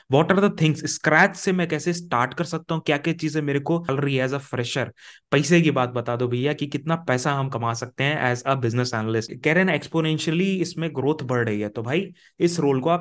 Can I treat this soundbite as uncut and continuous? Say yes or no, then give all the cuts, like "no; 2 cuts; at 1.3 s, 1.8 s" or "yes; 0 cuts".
no; 2 cuts; at 3.9 s, 9.3 s